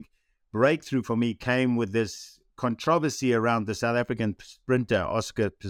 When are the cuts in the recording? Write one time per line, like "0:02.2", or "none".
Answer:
none